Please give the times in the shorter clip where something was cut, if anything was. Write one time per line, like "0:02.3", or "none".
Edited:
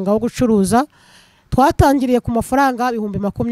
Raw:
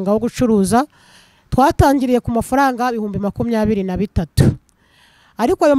none